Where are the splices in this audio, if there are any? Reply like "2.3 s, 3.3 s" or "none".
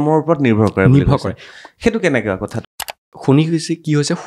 2.7 s